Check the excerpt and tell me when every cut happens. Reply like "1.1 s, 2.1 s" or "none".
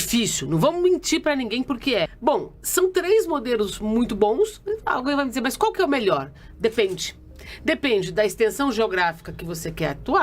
2.1 s